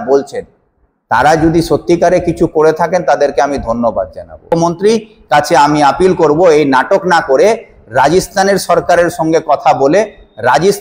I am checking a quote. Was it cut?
yes; 1 cut; at 4.8 s

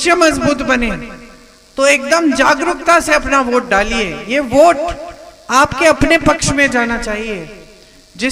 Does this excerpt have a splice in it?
no; 0 cuts

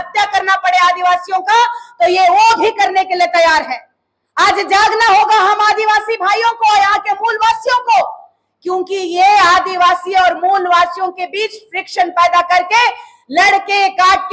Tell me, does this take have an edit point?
no; 0 cuts

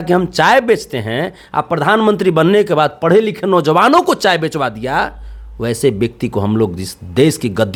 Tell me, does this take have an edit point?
no; 0 cuts

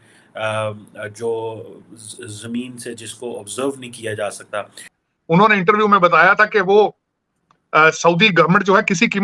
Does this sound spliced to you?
yes; 1 cut; at 5.0 s

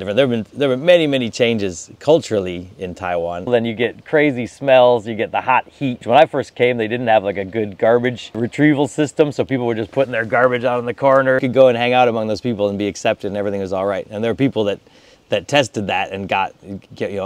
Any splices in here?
yes; 4 cuts; at 3.5 s, 6.0 s, 8.4 s, 11.4 s

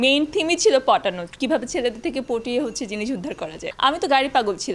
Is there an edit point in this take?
yes; 1 cut; at 3.7 s

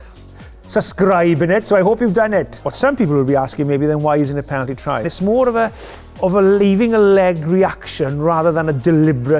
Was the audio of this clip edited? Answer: yes; 2 cuts; at 2.6 s, 5.1 s

